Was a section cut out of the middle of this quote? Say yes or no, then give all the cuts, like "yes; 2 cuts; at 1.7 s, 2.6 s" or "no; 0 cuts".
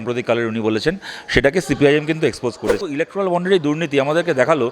yes; 1 cut; at 2.8 s